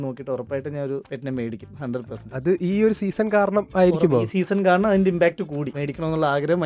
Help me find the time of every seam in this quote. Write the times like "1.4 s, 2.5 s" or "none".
5.7 s